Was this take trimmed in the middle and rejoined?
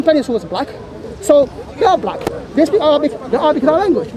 no; 0 cuts

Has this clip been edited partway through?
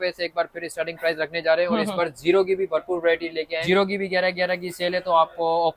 no; 0 cuts

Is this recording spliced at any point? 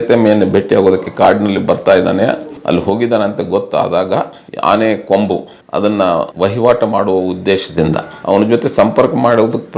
yes; 3 cuts; at 2.5 s, 4.4 s, 6.3 s

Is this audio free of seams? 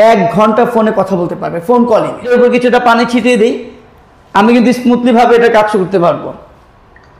no; 1 cut; at 2.3 s

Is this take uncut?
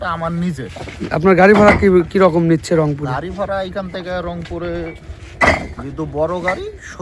yes; 0 cuts

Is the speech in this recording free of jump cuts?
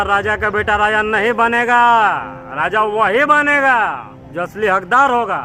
yes; 0 cuts

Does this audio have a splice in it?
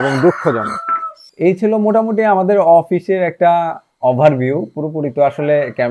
yes; 1 cut; at 1.2 s

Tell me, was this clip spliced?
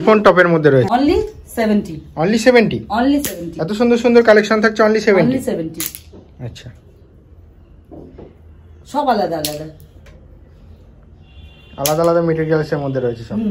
yes; 1 cut; at 0.9 s

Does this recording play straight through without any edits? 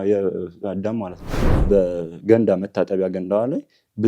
no; 1 cut; at 1.5 s

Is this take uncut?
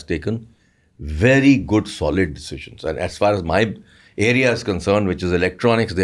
yes; 0 cuts

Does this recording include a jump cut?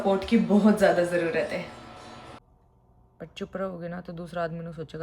yes; 1 cut; at 2.4 s

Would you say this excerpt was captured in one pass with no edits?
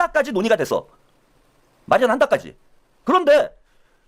yes; 0 cuts

